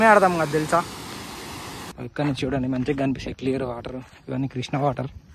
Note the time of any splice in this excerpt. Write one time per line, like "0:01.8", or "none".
0:01.7